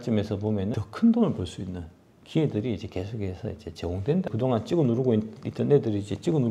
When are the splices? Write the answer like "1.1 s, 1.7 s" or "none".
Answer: 0.7 s, 4.3 s

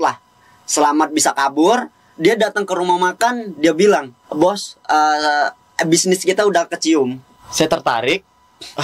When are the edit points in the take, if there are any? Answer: 4.2 s, 7.2 s

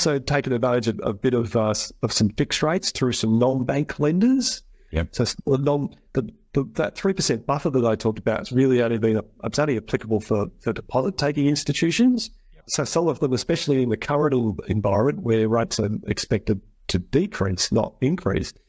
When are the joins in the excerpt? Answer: 12.6 s

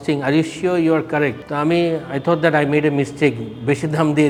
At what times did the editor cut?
none

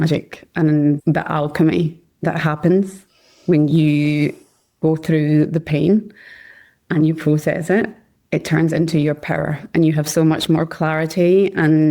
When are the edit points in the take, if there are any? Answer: 1.0 s

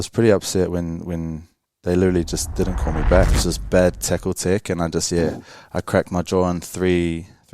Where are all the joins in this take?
3.4 s

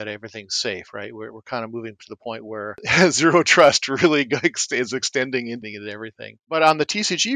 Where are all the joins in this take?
2.8 s, 5.6 s

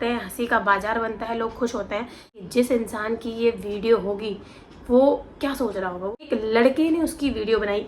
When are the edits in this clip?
2.4 s, 6.3 s

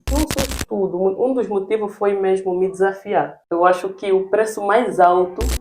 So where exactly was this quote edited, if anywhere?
3.4 s

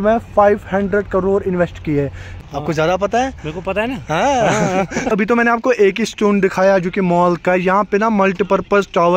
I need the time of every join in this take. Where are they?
2.4 s, 5.1 s

